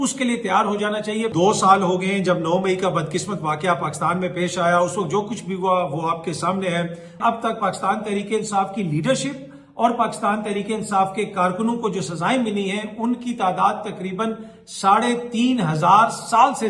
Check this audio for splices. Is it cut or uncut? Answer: cut